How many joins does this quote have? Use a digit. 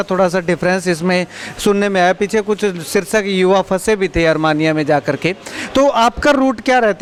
0